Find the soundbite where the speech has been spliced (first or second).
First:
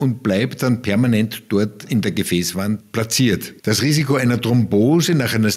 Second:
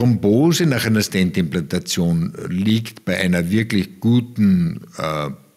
first